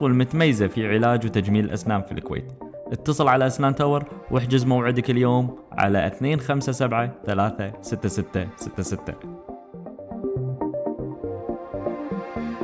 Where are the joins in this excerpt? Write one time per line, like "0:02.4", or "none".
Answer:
0:09.1